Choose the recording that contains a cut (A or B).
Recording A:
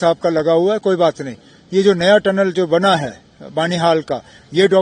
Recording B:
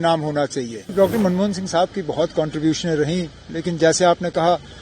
B